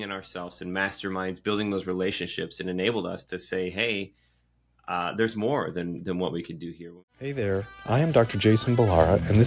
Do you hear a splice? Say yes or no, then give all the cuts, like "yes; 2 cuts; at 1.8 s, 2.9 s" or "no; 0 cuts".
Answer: yes; 1 cut; at 6.8 s